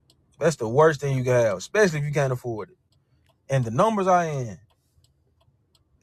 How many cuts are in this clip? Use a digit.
0